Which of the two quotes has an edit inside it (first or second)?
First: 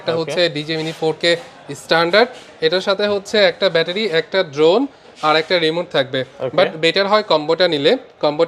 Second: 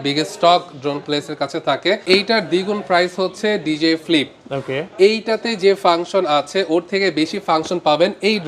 second